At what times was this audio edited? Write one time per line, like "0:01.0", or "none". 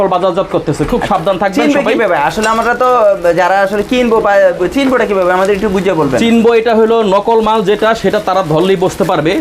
none